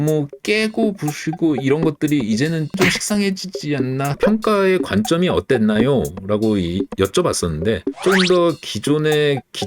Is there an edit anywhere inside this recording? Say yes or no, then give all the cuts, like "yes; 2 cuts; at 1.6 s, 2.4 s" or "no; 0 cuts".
yes; 1 cut; at 4.1 s